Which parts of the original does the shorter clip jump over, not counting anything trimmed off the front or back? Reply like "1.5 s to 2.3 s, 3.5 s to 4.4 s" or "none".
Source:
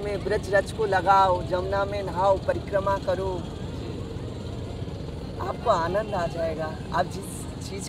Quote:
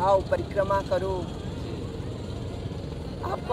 none